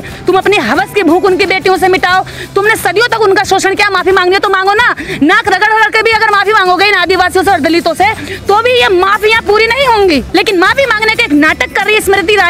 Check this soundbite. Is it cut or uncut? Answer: uncut